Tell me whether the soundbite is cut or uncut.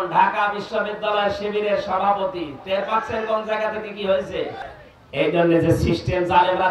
cut